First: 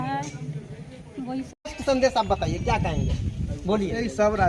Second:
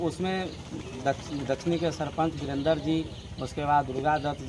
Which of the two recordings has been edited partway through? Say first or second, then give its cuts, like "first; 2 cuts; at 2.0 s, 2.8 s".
first; 1 cut; at 1.7 s